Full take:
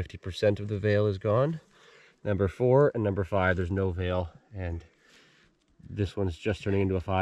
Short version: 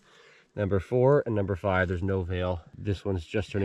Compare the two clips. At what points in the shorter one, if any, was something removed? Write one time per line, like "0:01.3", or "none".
0:02.7

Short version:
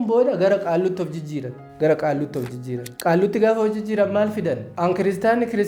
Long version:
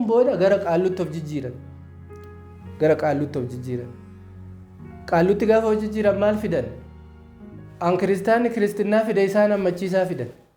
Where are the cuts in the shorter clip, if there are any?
0:01.6
0:02.9
0:04.7

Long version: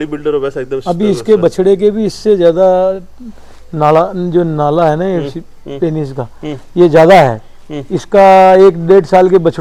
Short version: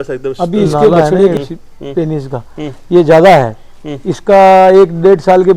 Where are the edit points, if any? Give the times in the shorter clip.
0:01.3

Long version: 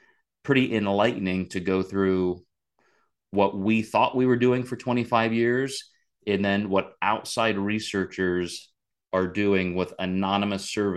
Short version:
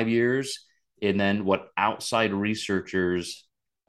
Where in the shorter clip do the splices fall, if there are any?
none

